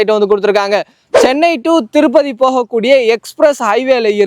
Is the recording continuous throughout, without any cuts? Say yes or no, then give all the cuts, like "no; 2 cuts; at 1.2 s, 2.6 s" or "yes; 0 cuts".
no; 1 cut; at 1.0 s